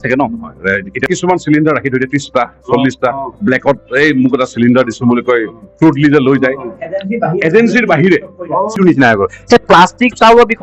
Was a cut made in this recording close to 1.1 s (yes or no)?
yes